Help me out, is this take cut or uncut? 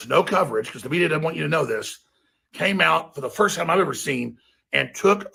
uncut